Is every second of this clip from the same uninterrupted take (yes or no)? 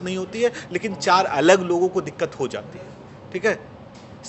yes